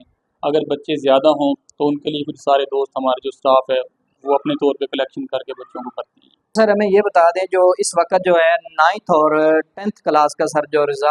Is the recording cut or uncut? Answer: cut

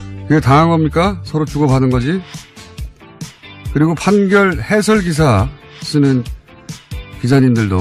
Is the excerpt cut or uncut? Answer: cut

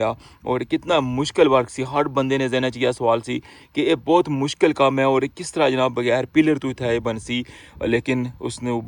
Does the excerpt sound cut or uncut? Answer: uncut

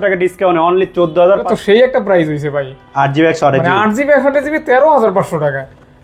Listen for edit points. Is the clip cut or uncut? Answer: cut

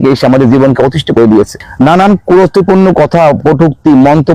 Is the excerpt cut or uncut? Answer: cut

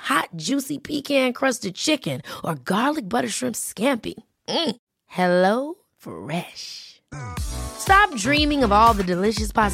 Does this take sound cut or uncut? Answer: uncut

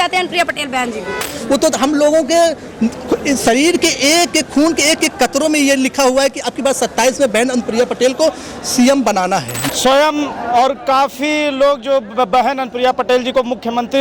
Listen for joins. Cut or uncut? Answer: cut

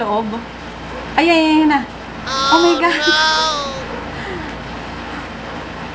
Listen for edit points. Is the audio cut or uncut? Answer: uncut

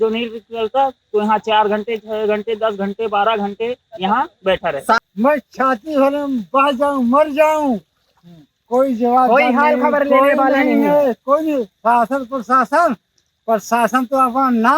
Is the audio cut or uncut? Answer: cut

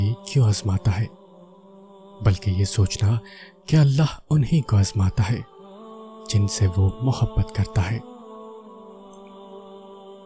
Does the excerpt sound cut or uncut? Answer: uncut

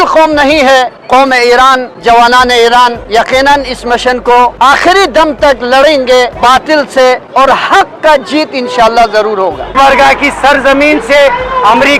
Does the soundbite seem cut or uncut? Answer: cut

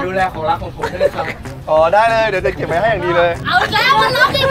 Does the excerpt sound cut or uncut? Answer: cut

